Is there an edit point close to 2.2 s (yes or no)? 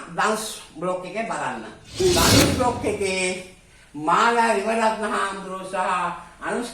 yes